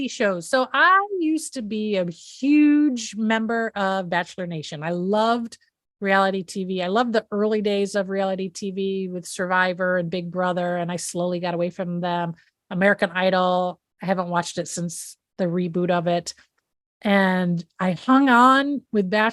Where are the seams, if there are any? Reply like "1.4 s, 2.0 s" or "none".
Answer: none

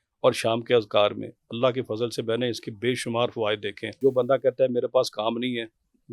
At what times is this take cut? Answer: 3.9 s

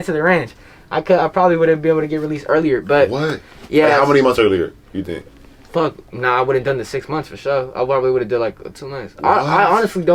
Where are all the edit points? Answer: none

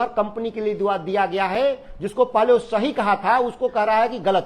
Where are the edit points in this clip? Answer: none

